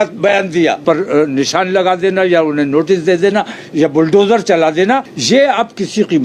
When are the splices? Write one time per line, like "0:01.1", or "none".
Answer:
0:00.8
0:05.1